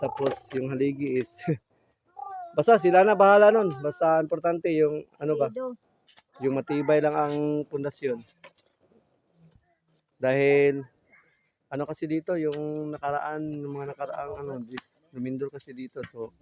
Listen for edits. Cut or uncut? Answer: uncut